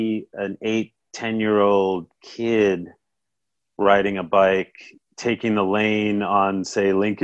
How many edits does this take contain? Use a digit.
0